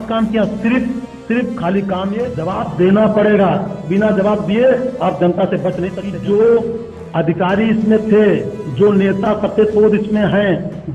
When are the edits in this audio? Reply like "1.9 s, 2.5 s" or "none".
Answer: 2.4 s, 6.0 s